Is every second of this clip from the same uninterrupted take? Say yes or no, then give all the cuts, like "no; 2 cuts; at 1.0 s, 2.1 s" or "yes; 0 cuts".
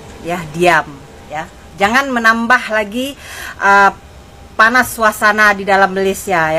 yes; 0 cuts